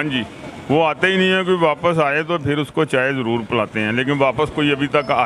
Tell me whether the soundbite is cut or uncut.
uncut